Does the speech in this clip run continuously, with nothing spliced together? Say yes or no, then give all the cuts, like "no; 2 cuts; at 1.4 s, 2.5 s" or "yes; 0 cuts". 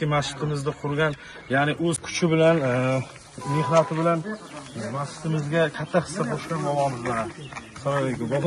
no; 1 cut; at 2.1 s